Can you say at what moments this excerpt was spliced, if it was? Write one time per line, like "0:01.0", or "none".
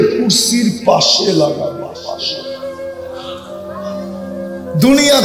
0:02.2
0:04.3